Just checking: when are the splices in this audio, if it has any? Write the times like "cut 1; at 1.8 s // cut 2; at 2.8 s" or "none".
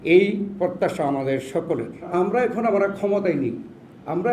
cut 1; at 2.1 s